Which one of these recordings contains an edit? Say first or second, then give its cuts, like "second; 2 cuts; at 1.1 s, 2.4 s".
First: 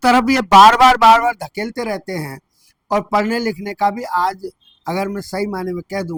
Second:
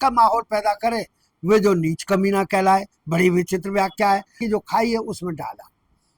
second; 1 cut; at 4.4 s